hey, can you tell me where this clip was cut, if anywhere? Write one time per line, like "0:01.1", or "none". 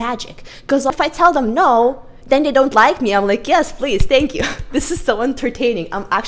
0:00.9